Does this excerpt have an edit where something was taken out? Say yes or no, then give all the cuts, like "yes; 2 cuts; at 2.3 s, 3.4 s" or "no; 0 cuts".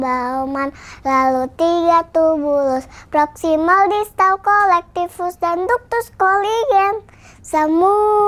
no; 0 cuts